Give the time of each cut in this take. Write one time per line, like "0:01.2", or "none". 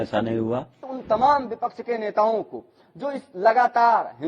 0:00.9